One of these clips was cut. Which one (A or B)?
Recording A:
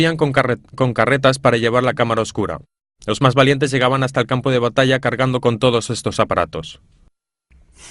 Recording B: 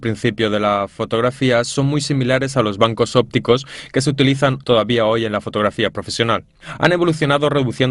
B